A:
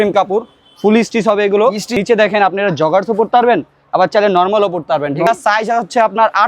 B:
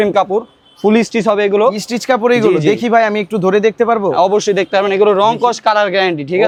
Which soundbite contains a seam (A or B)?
A